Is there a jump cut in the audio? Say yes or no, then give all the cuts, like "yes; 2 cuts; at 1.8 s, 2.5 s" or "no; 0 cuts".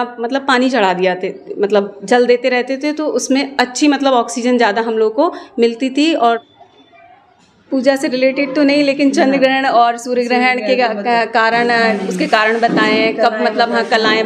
yes; 1 cut; at 6.4 s